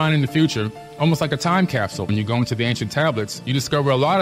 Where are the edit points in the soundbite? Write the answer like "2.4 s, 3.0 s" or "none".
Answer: 2.1 s